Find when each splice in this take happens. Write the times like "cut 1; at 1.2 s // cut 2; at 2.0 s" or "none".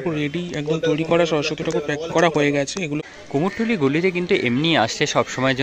cut 1; at 3.0 s

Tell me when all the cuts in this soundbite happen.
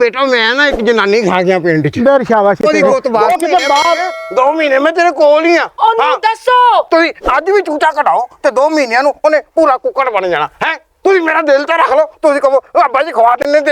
cut 1; at 3.2 s

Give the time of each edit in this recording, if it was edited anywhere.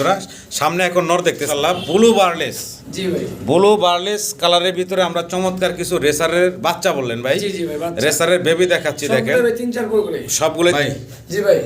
cut 1; at 1.4 s // cut 2; at 10.7 s

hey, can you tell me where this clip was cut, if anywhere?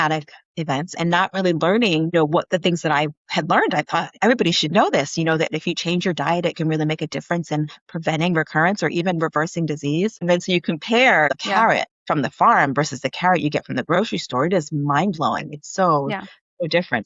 cut 1; at 10.2 s // cut 2; at 11.4 s

